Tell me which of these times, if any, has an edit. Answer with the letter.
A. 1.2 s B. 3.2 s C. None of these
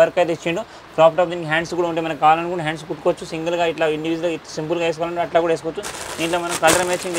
C